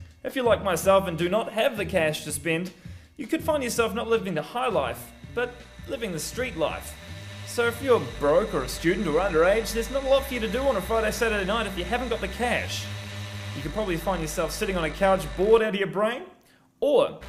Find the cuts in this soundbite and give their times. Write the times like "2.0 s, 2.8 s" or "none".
13.8 s